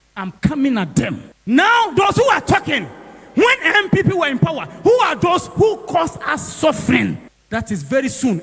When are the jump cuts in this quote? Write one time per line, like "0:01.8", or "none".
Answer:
0:01.4